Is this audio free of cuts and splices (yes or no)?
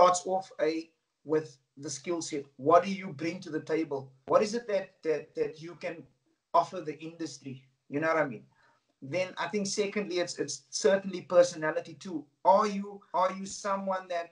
yes